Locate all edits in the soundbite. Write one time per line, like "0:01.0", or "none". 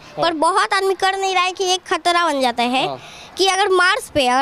none